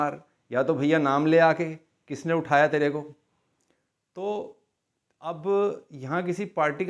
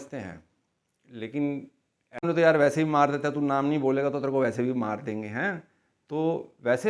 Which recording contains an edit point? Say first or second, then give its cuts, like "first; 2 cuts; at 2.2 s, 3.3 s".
second; 1 cut; at 2.2 s